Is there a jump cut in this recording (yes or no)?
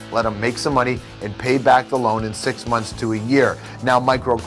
no